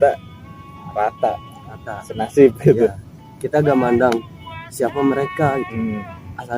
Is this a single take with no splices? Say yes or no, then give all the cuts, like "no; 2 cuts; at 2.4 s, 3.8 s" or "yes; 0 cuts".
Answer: yes; 0 cuts